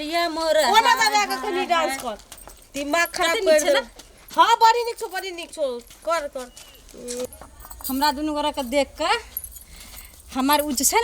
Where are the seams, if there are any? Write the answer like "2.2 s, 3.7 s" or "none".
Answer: 7.3 s